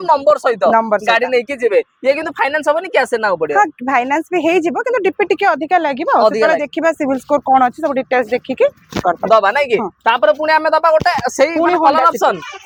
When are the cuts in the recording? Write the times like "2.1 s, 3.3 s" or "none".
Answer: none